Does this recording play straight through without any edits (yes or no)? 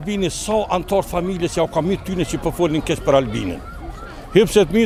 yes